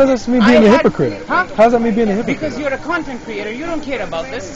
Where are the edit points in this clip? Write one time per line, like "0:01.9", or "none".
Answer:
none

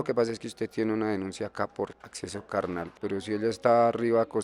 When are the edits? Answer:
0:02.0
0:02.9

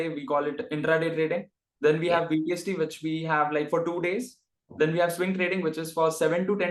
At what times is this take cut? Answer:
none

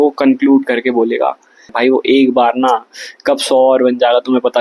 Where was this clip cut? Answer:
0:01.7

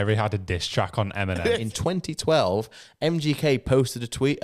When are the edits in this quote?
0:01.7

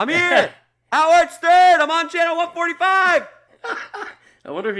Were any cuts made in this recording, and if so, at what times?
none

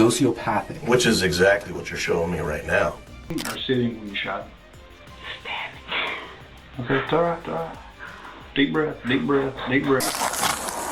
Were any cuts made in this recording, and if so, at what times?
0:03.1
0:10.0

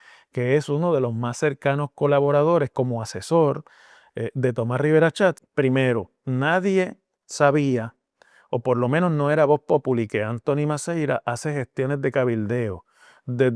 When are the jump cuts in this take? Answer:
0:05.4

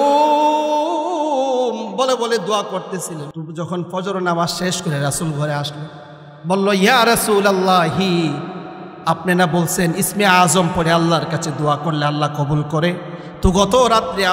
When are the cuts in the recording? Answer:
0:03.3

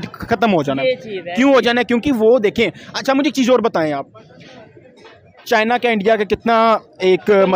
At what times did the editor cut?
none

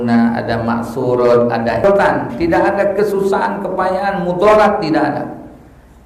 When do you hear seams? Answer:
0:01.8

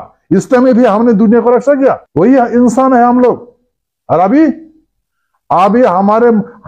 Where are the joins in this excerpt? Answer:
0:02.0

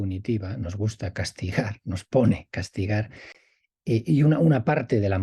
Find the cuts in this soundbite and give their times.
none

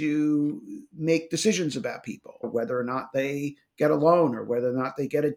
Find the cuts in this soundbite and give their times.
0:02.5

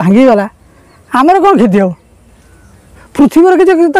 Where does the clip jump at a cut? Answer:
none

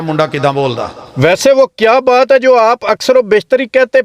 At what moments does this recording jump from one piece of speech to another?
0:01.0

